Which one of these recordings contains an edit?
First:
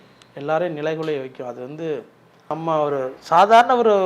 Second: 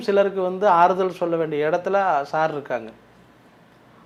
first; 1 cut; at 2.5 s

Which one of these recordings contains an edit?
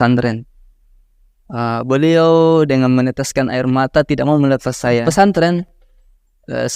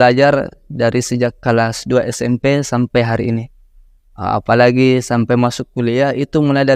first; 1 cut; at 5.0 s

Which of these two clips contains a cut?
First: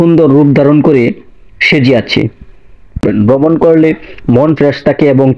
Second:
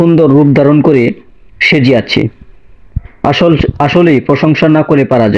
first; 1 cut; at 3.0 s

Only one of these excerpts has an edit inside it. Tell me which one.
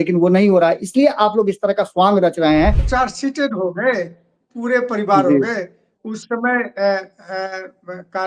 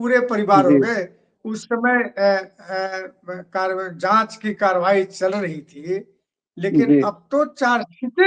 first; 1 cut; at 2.8 s

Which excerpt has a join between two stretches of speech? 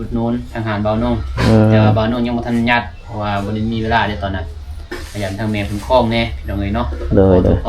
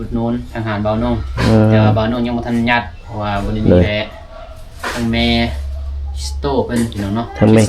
second; 1 cut; at 3.6 s

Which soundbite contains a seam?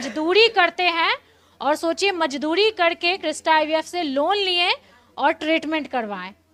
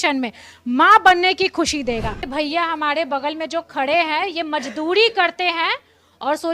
second; 1 cut; at 2.3 s

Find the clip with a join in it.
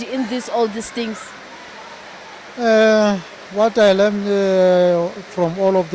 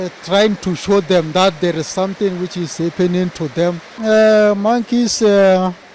second; 1 cut; at 3.9 s

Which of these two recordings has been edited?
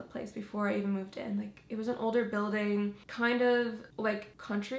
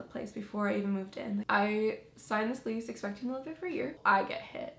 second; 2 cuts; at 1.4 s, 4.0 s

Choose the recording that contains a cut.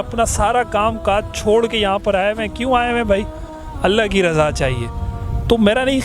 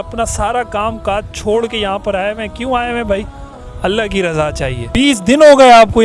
second; 1 cut; at 4.9 s

